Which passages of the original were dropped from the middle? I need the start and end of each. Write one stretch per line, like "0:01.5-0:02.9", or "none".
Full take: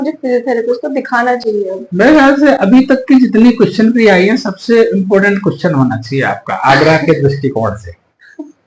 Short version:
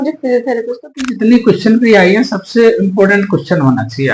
0:01.1-0:03.3